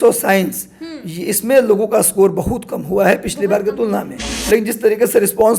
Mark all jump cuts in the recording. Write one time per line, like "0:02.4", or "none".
0:04.3

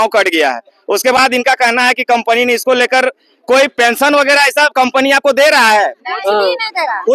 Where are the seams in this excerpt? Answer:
none

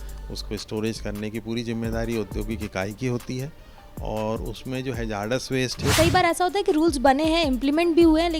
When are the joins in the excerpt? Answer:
0:05.9

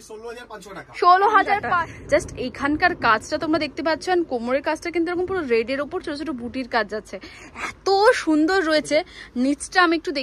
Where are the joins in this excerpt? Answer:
0:01.7

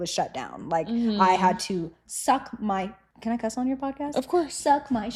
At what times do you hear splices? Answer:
none

